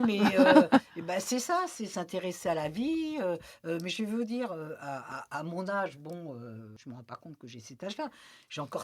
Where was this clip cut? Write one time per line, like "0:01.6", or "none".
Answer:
0:06.7